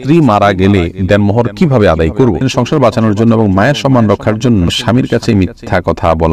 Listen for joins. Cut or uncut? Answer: cut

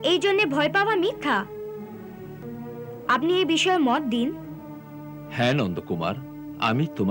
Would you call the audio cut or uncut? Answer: cut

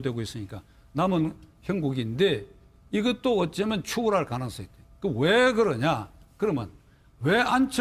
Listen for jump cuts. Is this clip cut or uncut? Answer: uncut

